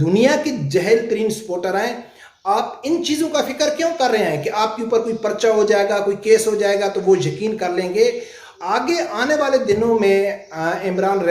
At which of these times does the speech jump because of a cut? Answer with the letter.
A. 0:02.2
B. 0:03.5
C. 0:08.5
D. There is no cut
C